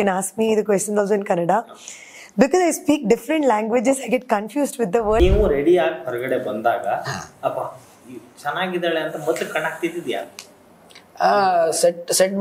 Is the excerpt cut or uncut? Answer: cut